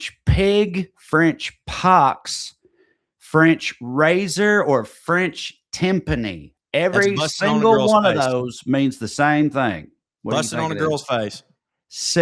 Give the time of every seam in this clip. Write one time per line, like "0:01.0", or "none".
none

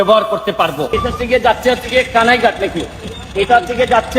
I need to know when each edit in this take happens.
0:01.0

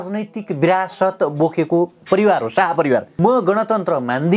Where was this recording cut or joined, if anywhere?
0:03.1

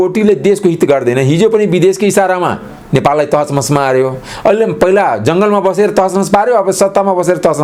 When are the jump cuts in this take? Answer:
none

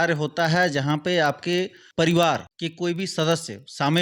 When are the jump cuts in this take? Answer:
0:01.8
0:02.6

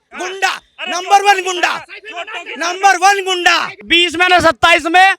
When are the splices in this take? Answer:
0:03.8

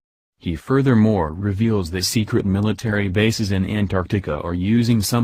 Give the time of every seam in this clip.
0:02.9

